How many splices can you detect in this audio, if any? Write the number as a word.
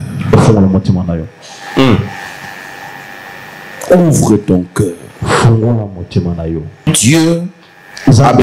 one